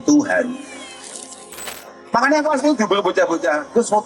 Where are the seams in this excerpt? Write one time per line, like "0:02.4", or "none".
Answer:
0:01.6